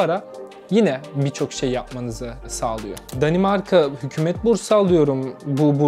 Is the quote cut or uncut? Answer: cut